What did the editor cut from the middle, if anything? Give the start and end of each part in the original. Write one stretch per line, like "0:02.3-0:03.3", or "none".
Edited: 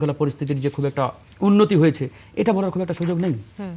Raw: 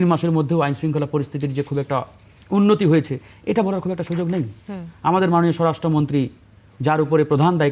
0:02.2-0:02.3

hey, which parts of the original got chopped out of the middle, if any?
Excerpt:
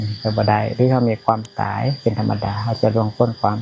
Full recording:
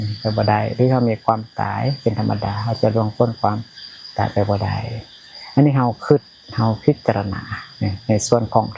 none

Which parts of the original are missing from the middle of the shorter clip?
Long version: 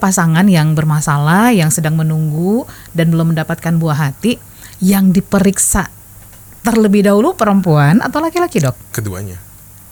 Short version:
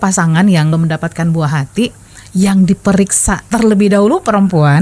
0:00.7-0:03.2
0:05.9-0:06.6

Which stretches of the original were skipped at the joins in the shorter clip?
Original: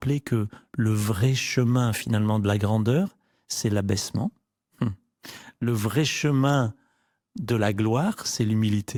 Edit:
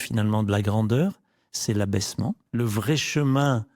0:04.4-0:05.5

